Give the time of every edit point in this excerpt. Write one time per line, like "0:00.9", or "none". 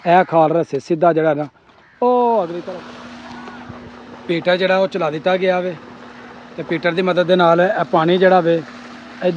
0:02.6